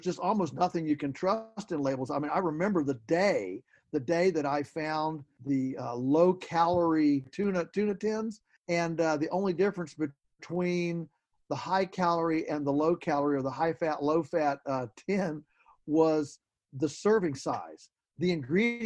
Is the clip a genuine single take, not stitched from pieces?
no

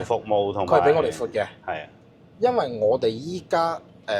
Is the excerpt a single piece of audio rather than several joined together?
yes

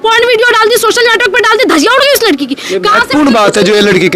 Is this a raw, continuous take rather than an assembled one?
yes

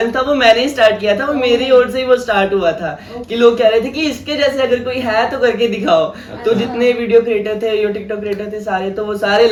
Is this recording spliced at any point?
no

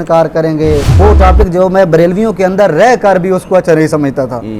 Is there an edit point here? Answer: yes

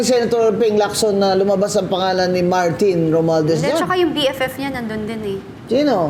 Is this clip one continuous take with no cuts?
yes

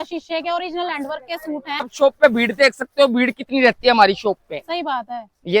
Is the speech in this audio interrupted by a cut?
yes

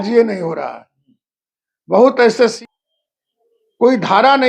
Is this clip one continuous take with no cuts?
no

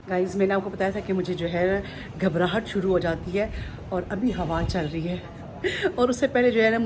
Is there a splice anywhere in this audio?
no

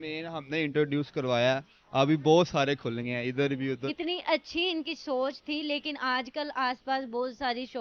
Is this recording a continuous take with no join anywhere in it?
no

